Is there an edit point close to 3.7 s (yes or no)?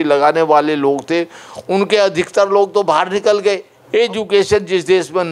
yes